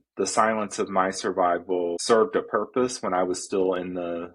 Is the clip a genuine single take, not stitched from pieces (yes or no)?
no